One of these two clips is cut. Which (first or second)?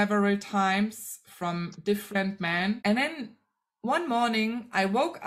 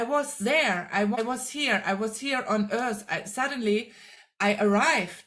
first